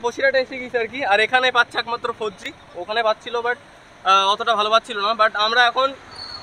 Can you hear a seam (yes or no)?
no